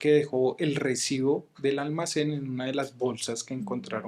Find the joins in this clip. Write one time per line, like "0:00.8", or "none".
none